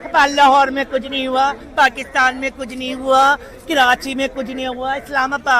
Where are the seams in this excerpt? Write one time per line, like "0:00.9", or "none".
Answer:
none

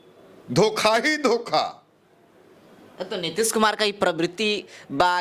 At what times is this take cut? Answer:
none

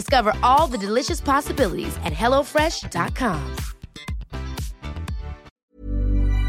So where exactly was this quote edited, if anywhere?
0:05.5

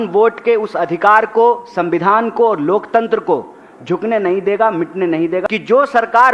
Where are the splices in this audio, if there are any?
0:05.4

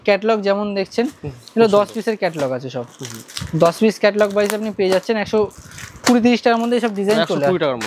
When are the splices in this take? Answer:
none

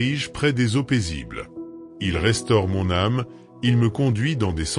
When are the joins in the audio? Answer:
0:01.4

